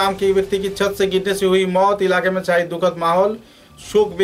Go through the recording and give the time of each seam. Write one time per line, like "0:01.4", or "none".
none